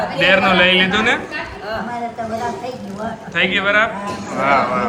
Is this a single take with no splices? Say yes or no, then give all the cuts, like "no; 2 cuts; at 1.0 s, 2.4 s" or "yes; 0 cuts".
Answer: yes; 0 cuts